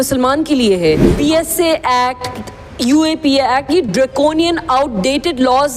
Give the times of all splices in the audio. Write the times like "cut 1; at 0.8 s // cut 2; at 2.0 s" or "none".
cut 1; at 1.1 s